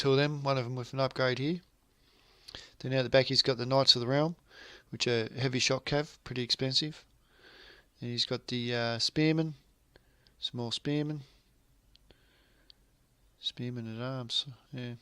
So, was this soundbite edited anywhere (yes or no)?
yes